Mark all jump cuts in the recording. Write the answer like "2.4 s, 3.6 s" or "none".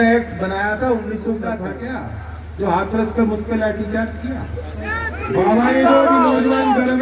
1.6 s, 5.2 s